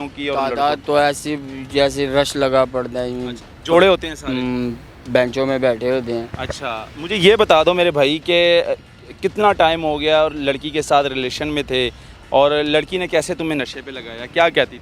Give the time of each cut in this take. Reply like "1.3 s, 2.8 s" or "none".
none